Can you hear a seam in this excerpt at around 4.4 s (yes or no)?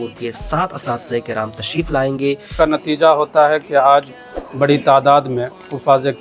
no